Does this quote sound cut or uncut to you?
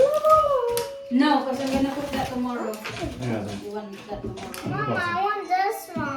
uncut